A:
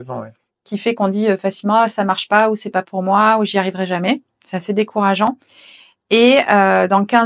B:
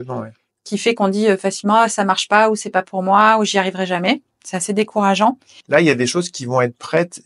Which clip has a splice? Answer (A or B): B